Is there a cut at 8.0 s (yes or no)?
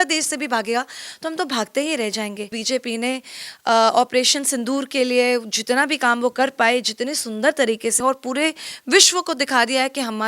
yes